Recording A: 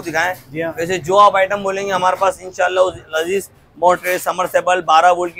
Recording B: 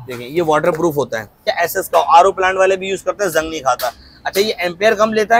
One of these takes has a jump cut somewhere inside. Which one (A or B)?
B